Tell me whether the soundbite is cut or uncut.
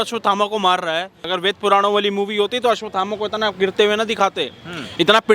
cut